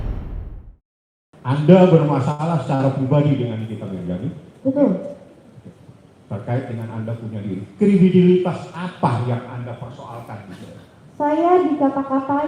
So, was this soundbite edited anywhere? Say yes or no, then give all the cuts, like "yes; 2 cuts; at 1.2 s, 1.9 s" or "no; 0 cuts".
yes; 1 cut; at 1.5 s